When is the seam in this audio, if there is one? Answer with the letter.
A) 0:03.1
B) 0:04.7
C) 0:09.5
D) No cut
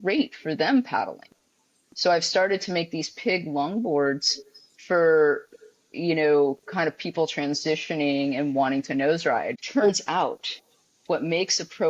C